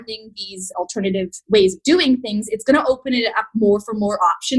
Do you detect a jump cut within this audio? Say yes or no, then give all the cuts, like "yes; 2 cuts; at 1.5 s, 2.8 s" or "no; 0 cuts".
no; 0 cuts